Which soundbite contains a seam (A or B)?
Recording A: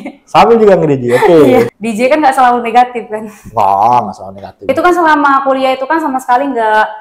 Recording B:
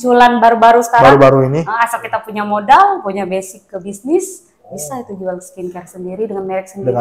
A